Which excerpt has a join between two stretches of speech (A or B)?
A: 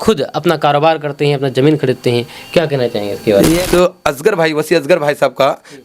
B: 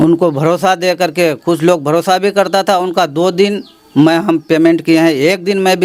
A